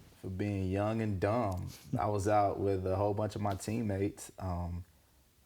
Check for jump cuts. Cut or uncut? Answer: cut